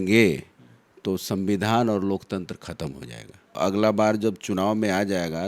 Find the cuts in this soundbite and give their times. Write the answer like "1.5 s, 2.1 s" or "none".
3.5 s